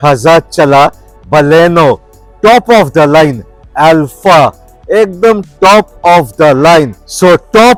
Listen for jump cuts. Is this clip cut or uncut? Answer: uncut